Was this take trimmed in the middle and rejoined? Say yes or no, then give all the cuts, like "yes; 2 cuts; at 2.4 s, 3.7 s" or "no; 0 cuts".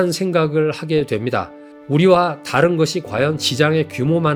no; 0 cuts